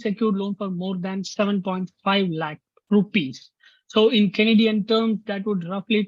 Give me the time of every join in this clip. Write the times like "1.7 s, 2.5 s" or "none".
none